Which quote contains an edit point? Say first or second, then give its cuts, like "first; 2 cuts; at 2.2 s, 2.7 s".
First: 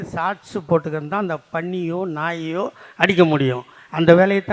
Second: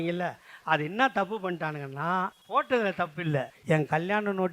second; 2 cuts; at 2.4 s, 3.5 s